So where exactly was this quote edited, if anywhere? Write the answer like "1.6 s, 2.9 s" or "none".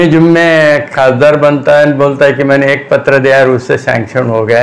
none